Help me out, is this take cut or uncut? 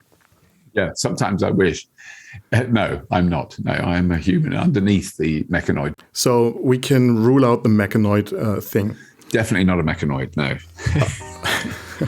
cut